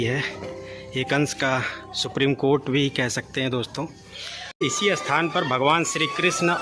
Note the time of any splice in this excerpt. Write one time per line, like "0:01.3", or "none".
0:04.6